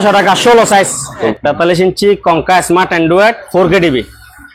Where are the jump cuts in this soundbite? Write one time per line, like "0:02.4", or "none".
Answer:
0:01.4